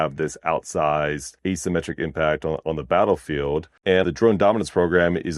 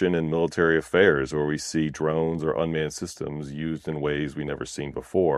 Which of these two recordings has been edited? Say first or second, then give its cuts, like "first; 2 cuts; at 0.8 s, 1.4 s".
first; 2 cuts; at 1.3 s, 4.0 s